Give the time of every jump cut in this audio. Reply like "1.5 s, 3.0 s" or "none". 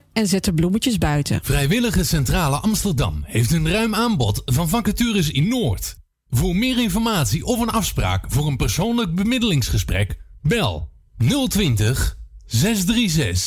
1.4 s

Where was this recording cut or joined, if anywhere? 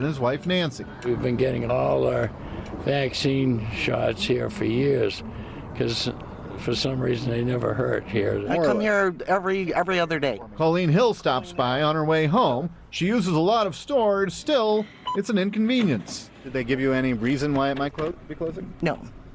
3.2 s

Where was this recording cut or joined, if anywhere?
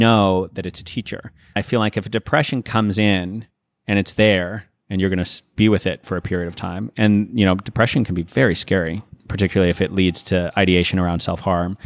1.6 s, 9.1 s

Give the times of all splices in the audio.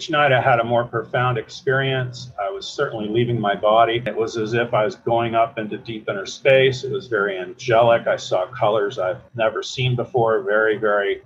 4.1 s

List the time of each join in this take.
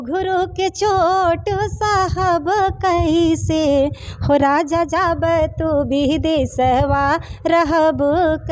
none

